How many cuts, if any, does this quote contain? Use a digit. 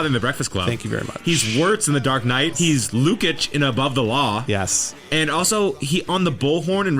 1